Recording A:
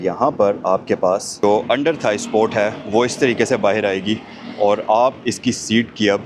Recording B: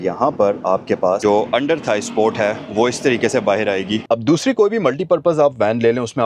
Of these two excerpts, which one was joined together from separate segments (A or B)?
B